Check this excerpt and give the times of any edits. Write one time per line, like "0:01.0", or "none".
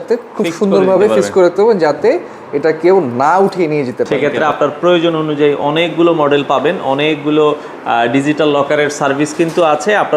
0:04.1